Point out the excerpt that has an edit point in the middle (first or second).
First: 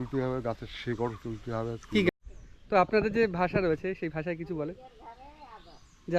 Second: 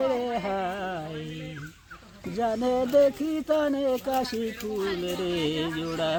first